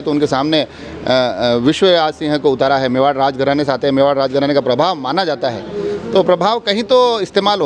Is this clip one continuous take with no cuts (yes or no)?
yes